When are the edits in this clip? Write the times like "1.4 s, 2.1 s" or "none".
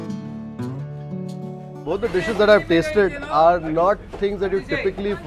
none